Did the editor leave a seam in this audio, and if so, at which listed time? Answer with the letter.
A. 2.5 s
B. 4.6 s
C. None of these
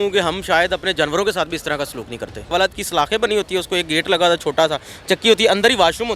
A